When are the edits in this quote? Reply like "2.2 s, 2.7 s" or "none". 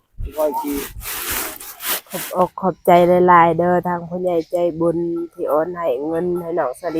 2.1 s